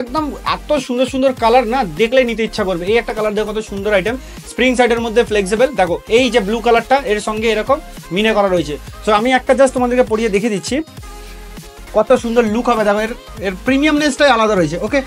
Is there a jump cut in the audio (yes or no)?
no